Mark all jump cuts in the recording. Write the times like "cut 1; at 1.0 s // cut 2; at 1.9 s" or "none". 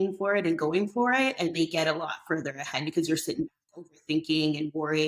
none